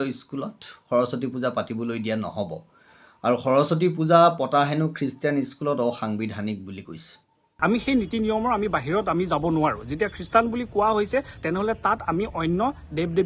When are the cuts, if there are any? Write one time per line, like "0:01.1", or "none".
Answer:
0:07.3